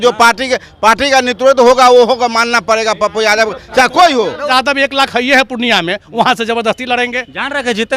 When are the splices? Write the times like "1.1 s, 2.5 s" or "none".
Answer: 4.5 s